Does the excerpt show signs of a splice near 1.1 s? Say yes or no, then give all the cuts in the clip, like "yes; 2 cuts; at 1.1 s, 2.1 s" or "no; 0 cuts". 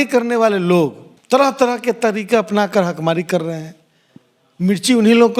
yes; 1 cut; at 1.1 s